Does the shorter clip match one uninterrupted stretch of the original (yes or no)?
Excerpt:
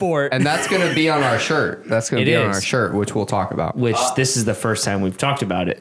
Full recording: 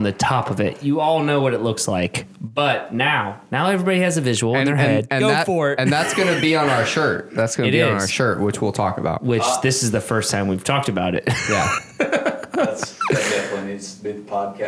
yes